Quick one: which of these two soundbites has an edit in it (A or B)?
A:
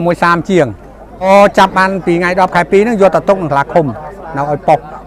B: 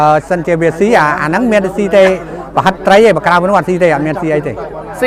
A